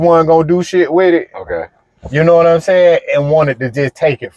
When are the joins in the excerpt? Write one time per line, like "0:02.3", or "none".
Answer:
none